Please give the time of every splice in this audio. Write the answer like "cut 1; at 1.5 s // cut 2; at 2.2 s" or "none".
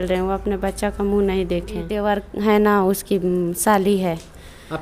cut 1; at 1.9 s